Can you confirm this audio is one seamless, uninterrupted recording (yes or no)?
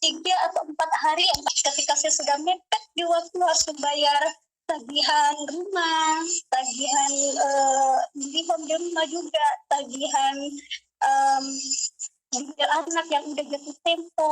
no